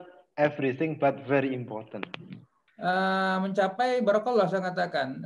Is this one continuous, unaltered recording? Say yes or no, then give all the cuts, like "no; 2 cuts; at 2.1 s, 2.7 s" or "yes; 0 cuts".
no; 1 cut; at 2.6 s